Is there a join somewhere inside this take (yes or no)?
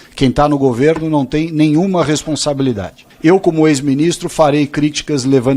yes